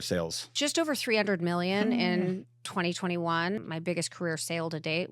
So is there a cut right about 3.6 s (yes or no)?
yes